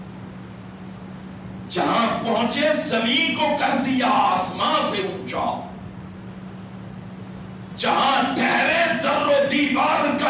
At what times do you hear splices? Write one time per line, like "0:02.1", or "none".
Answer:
none